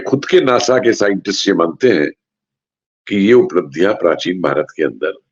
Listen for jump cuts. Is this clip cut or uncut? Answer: uncut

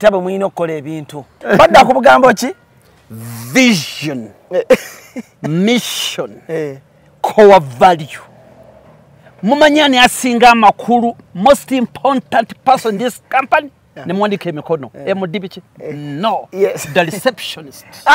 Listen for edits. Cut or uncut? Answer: cut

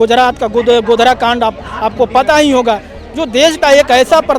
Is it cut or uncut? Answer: uncut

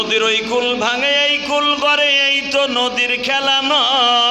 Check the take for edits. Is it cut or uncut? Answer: uncut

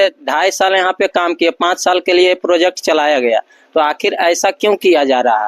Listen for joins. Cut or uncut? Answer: uncut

